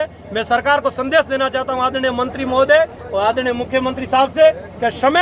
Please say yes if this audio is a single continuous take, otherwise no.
yes